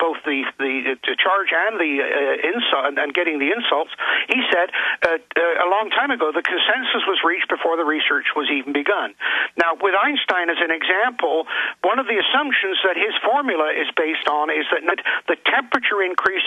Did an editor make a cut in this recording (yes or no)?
no